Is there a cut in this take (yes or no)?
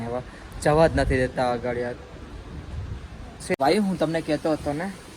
yes